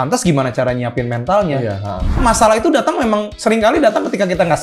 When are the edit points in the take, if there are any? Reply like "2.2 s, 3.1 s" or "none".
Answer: 2.2 s